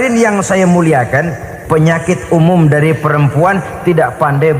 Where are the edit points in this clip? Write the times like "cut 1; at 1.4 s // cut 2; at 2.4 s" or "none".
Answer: cut 1; at 1.5 s